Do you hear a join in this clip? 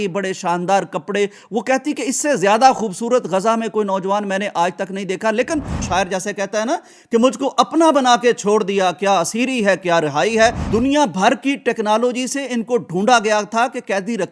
yes; 2 cuts; at 5.8 s, 10.6 s

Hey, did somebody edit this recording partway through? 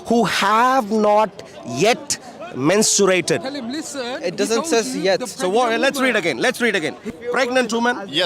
yes; 1 cut; at 7.1 s

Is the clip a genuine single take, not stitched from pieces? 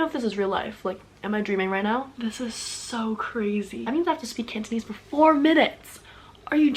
no; 2 cuts; at 2.1 s, 3.9 s

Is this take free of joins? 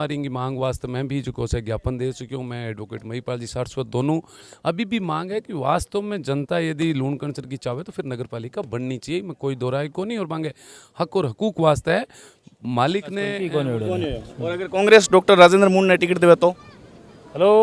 no; 1 cut; at 13.4 s

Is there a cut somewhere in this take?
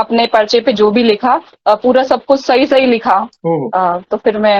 no; 0 cuts

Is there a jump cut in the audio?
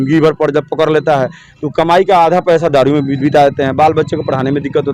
no; 0 cuts

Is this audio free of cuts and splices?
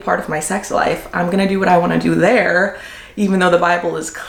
yes; 0 cuts

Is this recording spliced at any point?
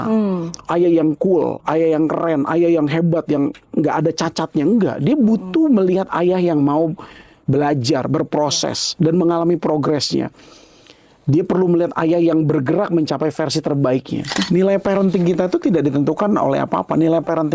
yes; 1 cut; at 14.4 s

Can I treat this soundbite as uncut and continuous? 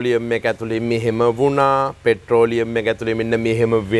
yes; 0 cuts

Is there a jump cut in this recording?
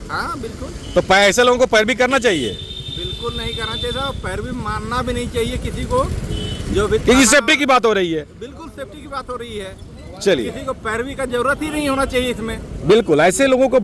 no; 0 cuts

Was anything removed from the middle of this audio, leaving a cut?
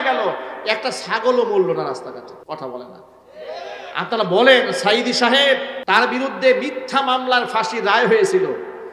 yes; 2 cuts; at 2.4 s, 5.7 s

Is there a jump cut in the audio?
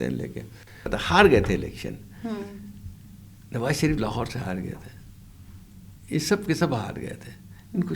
yes; 1 cut; at 0.9 s

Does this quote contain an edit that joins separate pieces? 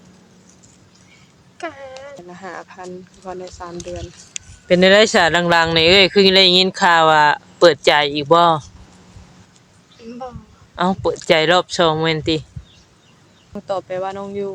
yes; 2 cuts; at 2.2 s, 13.6 s

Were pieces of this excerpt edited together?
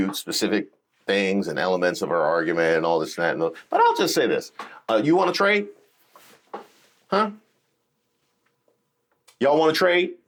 no; 0 cuts

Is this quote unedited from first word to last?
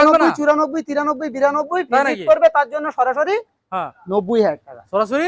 yes; 0 cuts

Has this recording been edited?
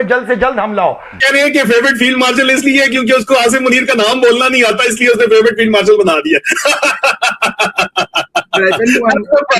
yes; 1 cut; at 1.2 s

